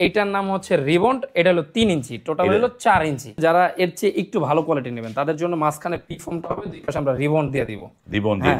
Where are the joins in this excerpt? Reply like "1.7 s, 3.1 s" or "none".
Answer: 3.3 s